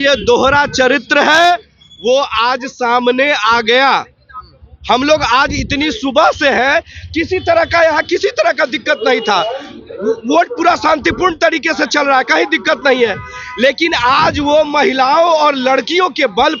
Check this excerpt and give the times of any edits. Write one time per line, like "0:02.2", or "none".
none